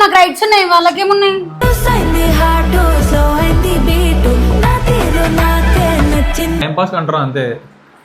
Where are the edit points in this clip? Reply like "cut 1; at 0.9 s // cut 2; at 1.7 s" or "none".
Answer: cut 1; at 6.6 s